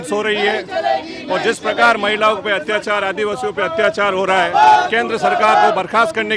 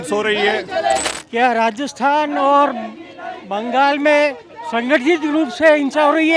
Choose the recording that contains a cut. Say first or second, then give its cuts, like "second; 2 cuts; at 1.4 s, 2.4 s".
second; 1 cut; at 1.1 s